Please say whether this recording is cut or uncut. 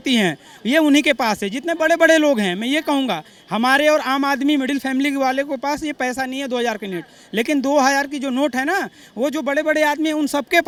uncut